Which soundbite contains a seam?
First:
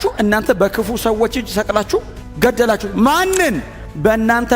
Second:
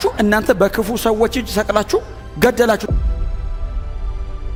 first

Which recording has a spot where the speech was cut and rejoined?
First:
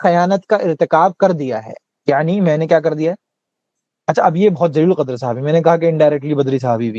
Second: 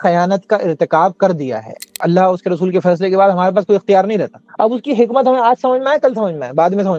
second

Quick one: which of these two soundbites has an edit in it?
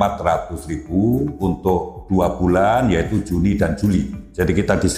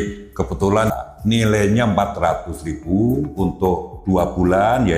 second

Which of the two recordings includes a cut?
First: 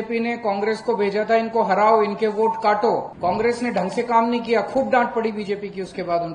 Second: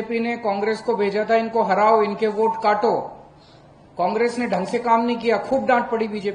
first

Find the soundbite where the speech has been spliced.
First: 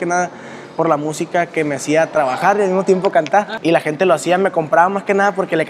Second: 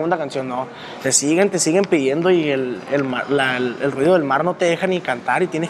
first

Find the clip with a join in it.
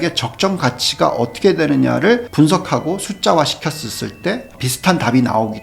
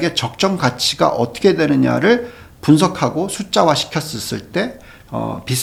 first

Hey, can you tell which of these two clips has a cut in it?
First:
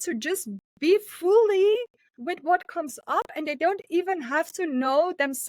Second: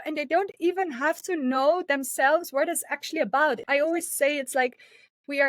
second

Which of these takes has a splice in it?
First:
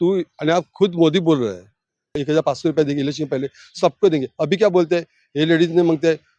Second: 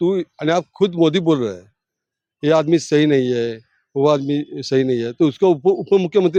first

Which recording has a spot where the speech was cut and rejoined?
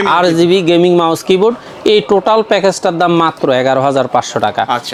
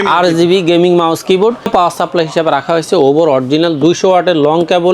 second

